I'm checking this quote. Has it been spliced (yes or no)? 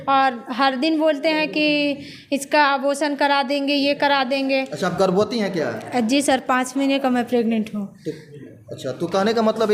no